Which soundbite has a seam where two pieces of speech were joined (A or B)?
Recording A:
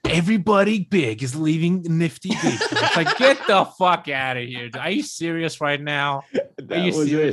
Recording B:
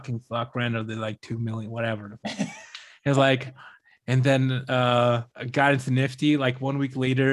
B